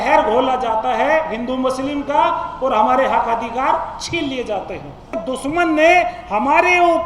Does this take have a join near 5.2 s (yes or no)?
yes